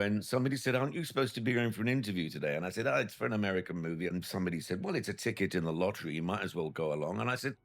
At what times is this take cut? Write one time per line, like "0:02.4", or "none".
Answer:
0:04.1